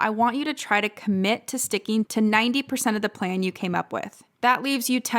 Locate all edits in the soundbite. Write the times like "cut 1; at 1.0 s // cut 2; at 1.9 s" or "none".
cut 1; at 2.1 s // cut 2; at 4.2 s